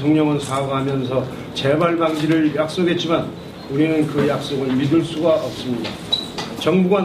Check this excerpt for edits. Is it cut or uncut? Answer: cut